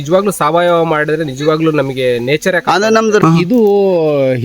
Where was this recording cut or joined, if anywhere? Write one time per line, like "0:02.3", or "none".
0:03.2

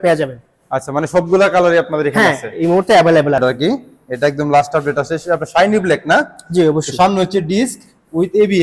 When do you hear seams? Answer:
0:03.4

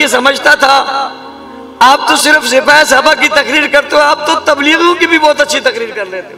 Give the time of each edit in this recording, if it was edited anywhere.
none

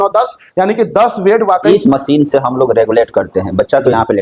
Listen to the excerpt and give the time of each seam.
0:01.7

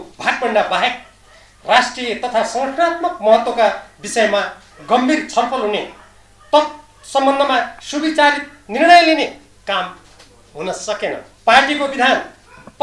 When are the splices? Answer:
0:11.3

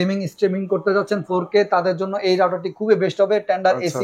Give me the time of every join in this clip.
none

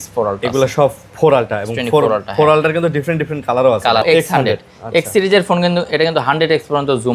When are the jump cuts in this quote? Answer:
0:04.0

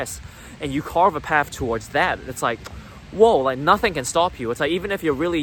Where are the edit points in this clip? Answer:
none

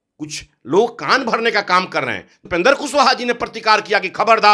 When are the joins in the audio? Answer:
0:02.4

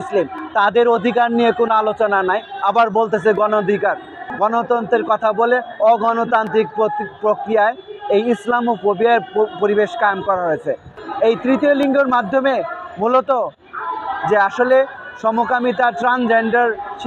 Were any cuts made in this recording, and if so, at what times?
0:04.3
0:10.9

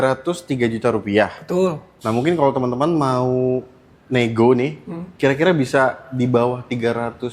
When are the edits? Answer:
none

